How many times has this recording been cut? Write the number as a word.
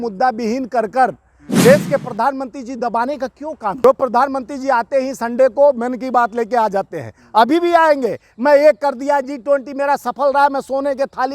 one